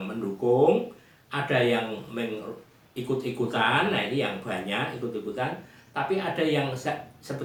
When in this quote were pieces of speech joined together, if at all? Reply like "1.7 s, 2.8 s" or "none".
none